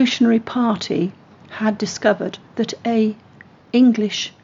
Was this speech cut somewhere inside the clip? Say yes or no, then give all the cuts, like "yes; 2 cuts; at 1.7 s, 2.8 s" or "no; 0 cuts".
no; 0 cuts